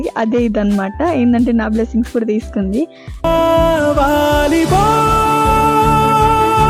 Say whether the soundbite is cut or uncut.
uncut